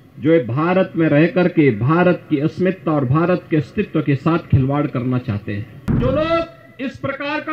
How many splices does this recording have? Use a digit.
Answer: 1